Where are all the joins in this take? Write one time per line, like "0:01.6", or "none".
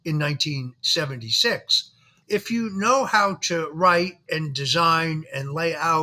0:02.1

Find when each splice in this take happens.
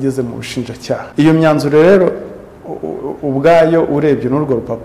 0:01.1

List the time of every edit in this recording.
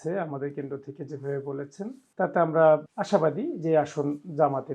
0:02.0
0:02.9

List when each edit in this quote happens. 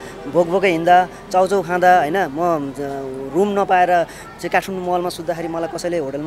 none

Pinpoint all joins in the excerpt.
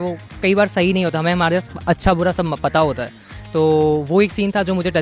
none

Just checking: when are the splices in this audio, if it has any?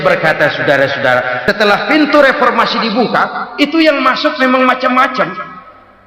0:01.4

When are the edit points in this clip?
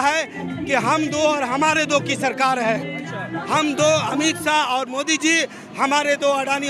none

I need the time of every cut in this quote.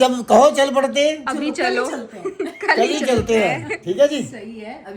none

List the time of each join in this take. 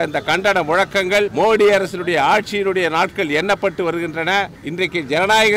0:01.3
0:04.6

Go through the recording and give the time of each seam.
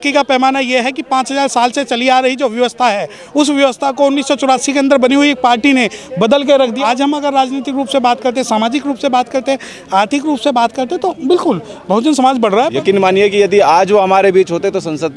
0:06.8
0:12.7

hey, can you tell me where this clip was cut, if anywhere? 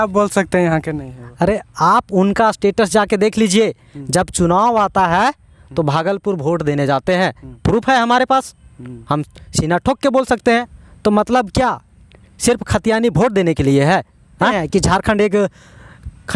0:10.8
0:14.5

